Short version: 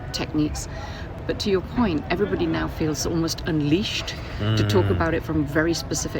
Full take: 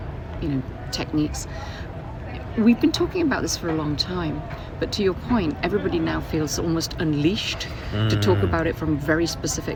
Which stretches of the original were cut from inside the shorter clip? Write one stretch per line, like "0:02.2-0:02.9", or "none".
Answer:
0:01.9-0:04.6